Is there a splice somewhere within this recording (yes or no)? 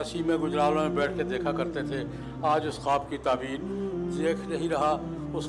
no